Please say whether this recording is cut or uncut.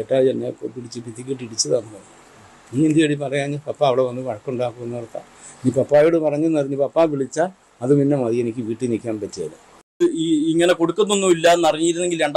cut